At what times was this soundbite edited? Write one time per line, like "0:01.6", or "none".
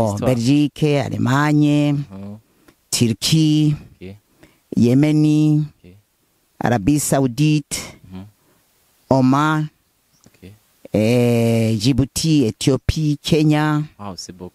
none